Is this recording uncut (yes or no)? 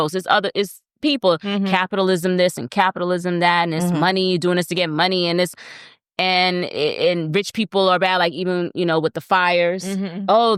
yes